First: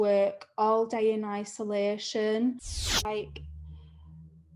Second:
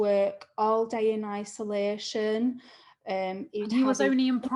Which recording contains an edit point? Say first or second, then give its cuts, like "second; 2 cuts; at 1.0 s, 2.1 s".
first; 1 cut; at 2.9 s